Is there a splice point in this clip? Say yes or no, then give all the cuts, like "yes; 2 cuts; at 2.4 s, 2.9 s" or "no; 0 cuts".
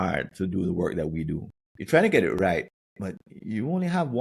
no; 0 cuts